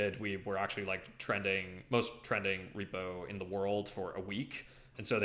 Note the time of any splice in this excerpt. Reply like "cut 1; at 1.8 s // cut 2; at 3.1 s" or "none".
none